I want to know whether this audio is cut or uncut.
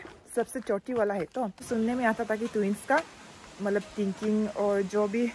cut